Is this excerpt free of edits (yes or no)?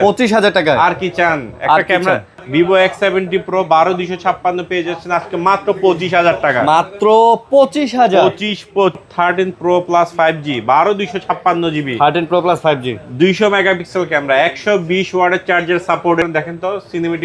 no